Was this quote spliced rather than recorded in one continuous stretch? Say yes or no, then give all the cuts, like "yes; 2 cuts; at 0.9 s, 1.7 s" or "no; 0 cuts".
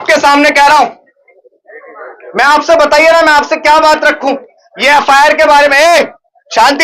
yes; 1 cut; at 1.3 s